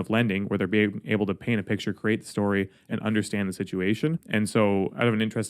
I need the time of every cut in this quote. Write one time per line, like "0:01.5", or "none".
0:04.2